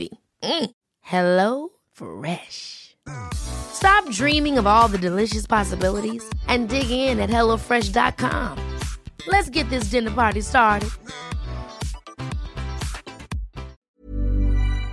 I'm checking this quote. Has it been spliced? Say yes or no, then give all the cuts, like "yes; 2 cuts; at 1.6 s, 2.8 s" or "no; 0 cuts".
yes; 1 cut; at 13.8 s